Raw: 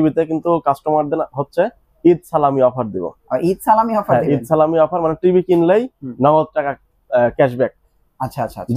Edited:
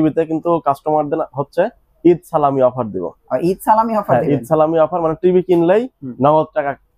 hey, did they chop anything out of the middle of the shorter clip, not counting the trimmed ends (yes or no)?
no